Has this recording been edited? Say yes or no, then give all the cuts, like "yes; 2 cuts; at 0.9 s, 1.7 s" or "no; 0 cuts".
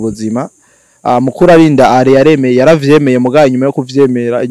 no; 0 cuts